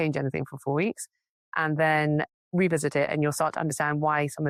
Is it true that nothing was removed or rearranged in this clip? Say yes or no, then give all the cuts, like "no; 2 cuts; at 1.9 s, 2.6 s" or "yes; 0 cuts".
yes; 0 cuts